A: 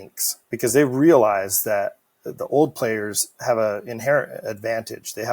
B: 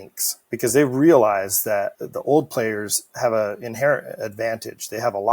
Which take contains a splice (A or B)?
B